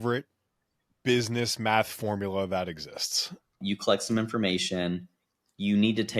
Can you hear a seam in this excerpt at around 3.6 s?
yes; 1 cut; at 3.6 s

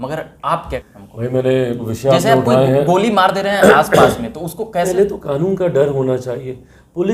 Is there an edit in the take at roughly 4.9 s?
yes; 3 cuts; at 0.8 s, 1.9 s, 4.9 s

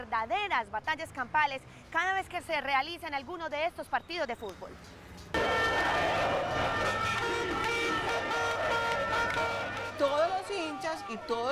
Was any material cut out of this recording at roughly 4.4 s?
yes; 1 cut; at 4.4 s

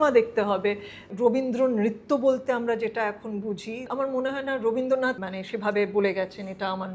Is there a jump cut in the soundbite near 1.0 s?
yes; 3 cuts; at 1.0 s, 3.9 s, 5.2 s

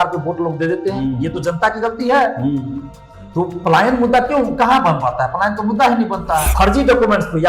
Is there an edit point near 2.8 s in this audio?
no; 1 cut; at 6.5 s

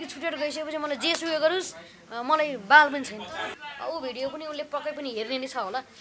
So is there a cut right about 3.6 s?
yes; 1 cut; at 3.6 s

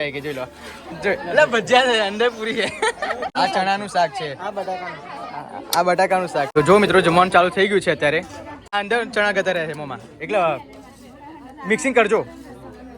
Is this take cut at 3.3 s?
yes; 3 cuts; at 3.3 s, 6.5 s, 8.7 s

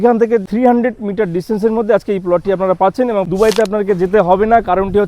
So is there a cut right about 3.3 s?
yes; 1 cut; at 3.3 s

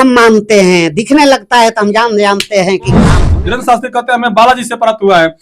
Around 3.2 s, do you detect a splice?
yes; 1 cut; at 3.2 s

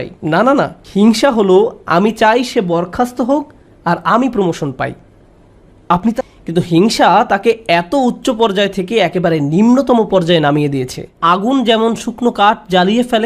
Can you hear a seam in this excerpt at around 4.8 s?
no; 2 cuts; at 6.1 s, 11.1 s

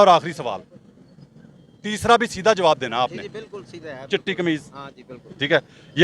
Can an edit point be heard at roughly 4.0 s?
no; 0 cuts

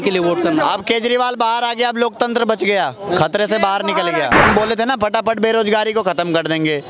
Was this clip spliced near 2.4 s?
no; 1 cut; at 4.4 s

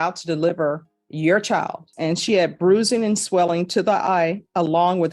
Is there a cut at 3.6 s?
no; 1 cut; at 1.9 s

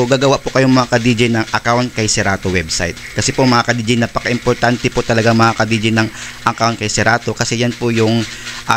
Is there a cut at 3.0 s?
no; 0 cuts

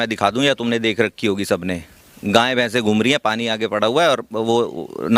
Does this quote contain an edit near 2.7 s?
no; 0 cuts

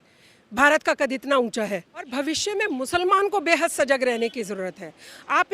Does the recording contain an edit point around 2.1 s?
yes; 1 cut; at 2.1 s

